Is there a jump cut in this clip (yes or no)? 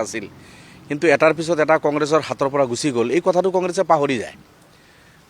no